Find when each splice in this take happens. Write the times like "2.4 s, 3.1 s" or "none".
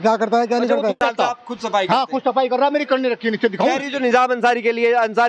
1.0 s